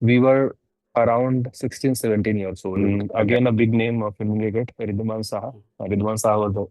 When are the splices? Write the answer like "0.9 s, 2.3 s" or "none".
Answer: 2.8 s